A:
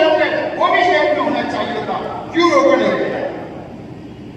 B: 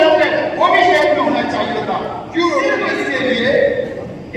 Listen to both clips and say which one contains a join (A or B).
B